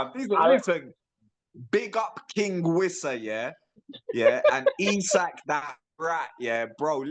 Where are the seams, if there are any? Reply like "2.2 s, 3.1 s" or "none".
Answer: none